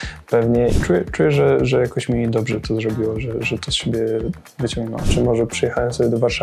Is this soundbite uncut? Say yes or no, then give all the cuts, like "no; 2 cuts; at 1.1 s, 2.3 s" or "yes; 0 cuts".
no; 2 cuts; at 0.7 s, 5.1 s